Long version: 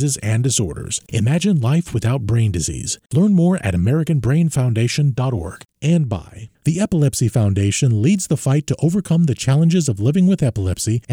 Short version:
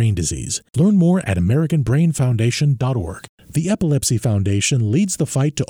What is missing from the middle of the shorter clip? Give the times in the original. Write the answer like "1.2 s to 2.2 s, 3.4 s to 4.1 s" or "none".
5.6 s to 6.4 s